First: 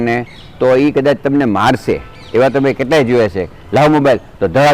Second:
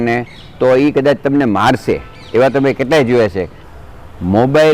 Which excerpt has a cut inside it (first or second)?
second